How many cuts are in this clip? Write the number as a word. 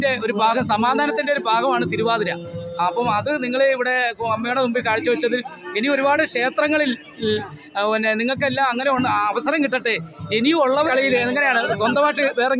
one